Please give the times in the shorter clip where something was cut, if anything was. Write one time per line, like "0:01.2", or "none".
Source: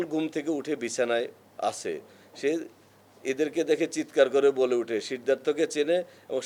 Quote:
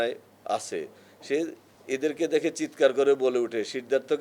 0:01.7